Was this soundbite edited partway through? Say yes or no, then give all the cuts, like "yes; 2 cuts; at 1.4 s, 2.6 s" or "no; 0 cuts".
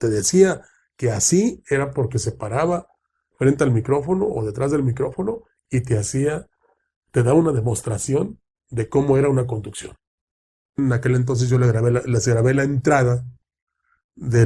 yes; 1 cut; at 10.8 s